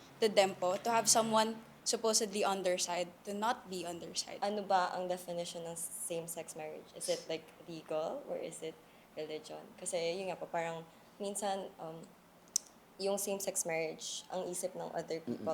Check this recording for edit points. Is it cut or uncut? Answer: cut